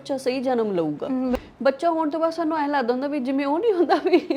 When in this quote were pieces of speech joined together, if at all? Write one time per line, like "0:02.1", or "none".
0:01.4